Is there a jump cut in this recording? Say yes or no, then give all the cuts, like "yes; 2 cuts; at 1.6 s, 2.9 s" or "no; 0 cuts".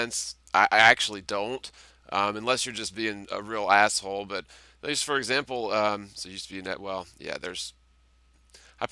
yes; 1 cut; at 7.3 s